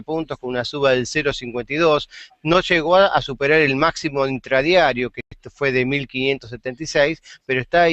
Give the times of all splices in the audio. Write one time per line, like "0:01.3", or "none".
none